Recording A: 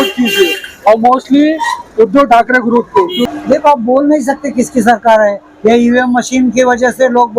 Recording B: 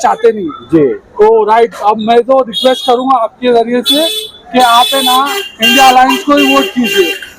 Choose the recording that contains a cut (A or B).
A